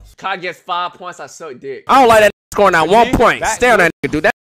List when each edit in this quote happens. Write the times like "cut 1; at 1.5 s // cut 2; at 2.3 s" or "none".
cut 1; at 1.8 s